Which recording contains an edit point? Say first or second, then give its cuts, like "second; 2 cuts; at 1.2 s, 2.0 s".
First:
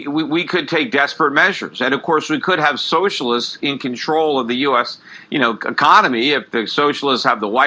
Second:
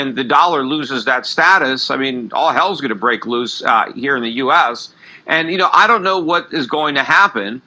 second; 1 cut; at 3.5 s